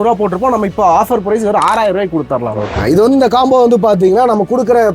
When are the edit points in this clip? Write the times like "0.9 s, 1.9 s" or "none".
2.8 s